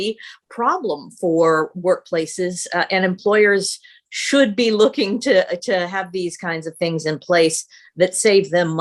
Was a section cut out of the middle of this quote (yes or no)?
no